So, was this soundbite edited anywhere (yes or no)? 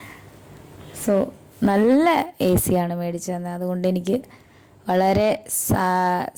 no